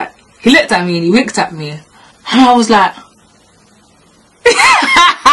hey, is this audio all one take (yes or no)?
yes